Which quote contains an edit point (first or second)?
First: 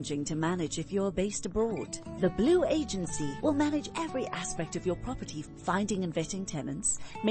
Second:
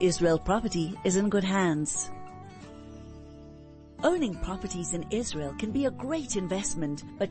second